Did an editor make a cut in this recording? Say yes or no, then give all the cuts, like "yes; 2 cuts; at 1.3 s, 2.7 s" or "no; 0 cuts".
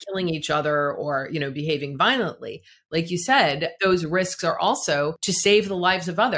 yes; 2 cuts; at 3.7 s, 5.2 s